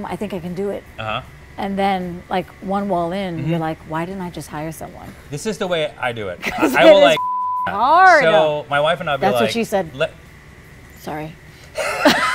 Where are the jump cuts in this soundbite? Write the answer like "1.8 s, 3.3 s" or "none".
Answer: 5.1 s